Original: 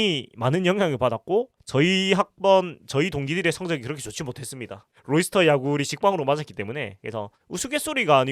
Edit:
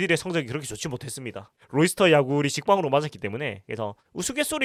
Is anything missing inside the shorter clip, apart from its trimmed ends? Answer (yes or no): no